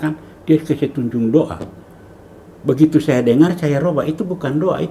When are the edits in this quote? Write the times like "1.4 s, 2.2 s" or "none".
none